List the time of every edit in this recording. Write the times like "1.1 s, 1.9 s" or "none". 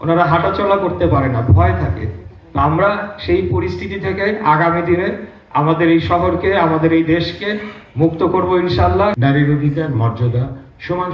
9.2 s